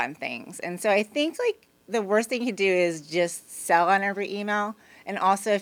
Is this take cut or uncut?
uncut